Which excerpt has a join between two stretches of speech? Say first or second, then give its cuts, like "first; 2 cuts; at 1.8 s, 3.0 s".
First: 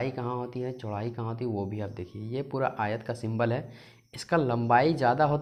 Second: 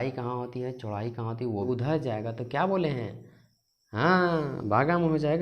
second; 1 cut; at 1.6 s